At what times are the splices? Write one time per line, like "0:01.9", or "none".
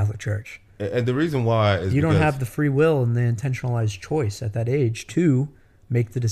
none